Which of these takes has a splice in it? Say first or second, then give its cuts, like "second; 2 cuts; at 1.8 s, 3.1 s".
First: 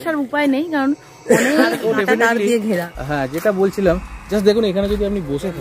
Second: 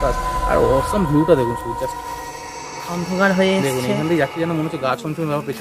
first; 1 cut; at 1.8 s